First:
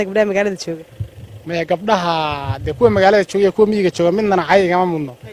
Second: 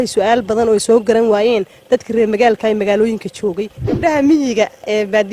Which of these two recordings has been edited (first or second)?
second